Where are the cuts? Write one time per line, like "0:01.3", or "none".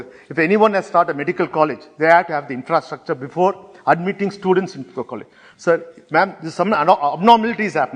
none